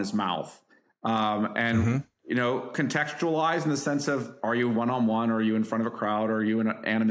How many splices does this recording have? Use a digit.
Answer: 0